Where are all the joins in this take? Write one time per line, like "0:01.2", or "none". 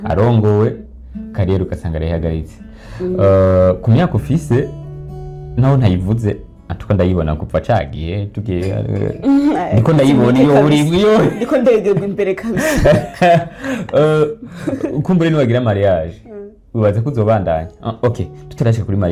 none